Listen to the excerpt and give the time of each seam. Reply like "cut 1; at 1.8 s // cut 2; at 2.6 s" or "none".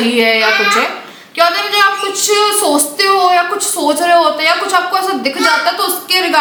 none